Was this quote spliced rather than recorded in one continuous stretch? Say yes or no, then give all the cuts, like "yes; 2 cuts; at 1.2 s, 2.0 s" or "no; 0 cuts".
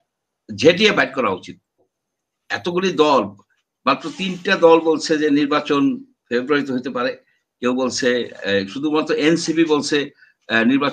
yes; 1 cut; at 1.8 s